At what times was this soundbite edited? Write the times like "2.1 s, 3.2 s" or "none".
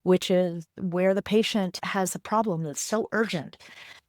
1.8 s

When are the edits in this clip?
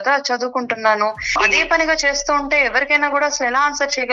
1.3 s

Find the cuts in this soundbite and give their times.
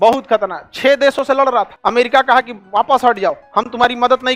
1.7 s, 2.6 s

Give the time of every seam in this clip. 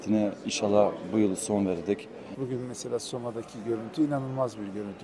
2.3 s

